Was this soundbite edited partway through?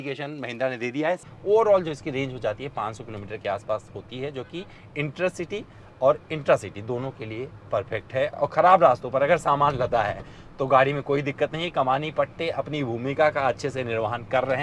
yes; 2 cuts; at 1.3 s, 8.3 s

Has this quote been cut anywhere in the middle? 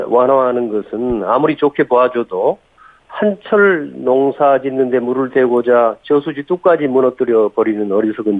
no; 0 cuts

